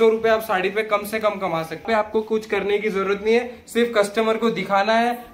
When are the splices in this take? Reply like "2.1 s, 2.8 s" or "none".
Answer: 1.8 s